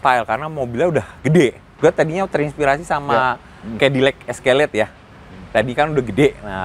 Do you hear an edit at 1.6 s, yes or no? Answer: yes